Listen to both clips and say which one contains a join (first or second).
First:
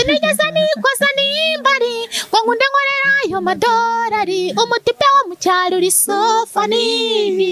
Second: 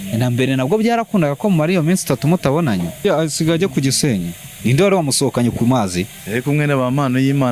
second